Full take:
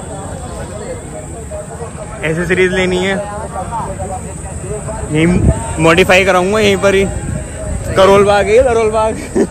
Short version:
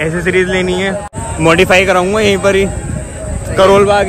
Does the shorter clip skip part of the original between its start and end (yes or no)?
yes